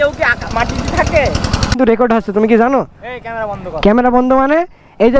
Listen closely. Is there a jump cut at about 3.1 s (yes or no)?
no